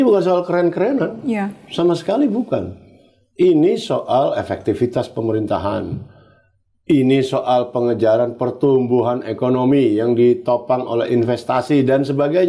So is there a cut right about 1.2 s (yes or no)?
no